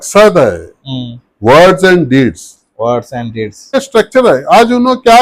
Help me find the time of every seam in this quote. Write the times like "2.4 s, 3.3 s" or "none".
3.8 s